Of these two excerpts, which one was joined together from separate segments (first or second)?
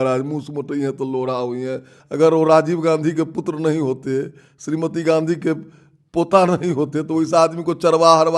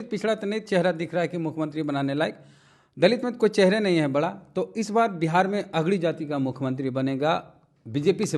first